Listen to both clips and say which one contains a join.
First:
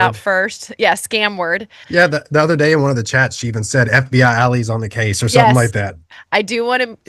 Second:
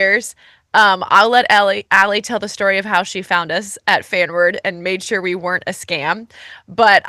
first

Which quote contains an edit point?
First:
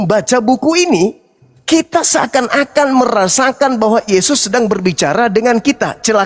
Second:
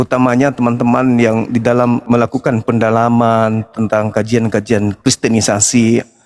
second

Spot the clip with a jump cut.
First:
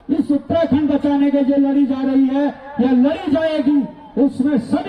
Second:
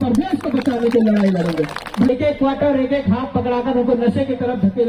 second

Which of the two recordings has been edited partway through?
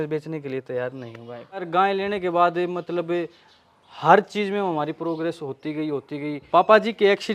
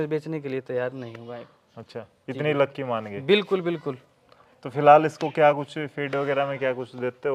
first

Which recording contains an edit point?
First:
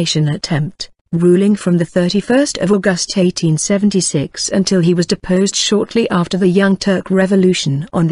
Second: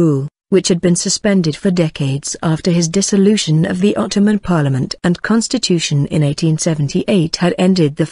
second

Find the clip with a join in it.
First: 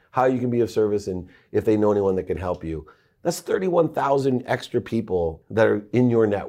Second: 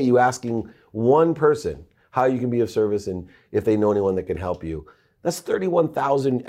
first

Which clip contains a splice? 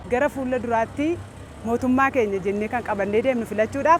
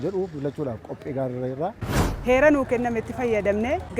second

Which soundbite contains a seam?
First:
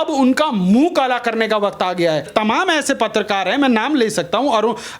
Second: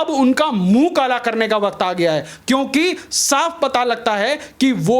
first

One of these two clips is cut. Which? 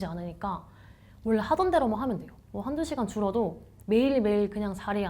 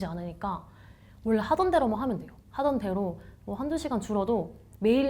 first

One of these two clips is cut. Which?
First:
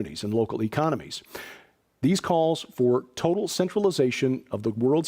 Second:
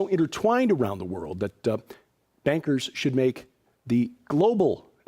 second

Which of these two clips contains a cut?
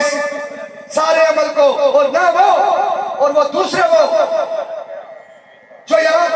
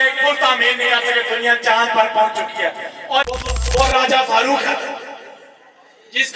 second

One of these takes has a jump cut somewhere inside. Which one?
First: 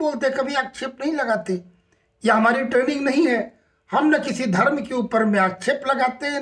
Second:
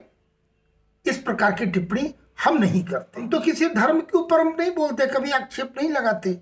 second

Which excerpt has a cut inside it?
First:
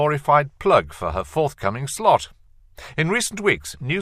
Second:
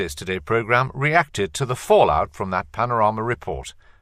second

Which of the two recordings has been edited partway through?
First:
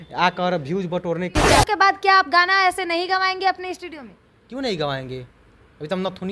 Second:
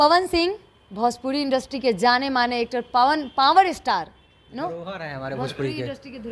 first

